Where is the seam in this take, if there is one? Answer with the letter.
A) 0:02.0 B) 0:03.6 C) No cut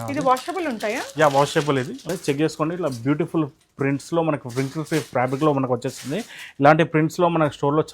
A